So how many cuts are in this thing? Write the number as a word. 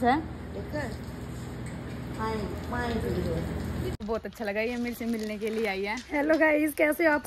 one